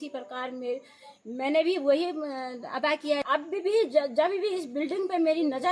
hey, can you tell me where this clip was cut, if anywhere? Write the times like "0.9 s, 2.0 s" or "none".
3.2 s